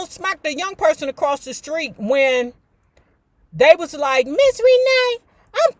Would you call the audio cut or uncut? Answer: uncut